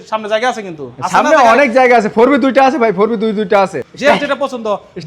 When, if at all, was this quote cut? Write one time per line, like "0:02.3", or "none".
0:03.9